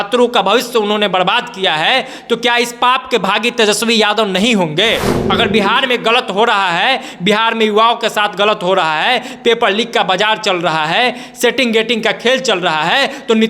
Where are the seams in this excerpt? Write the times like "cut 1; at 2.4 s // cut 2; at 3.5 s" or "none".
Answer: cut 1; at 5.2 s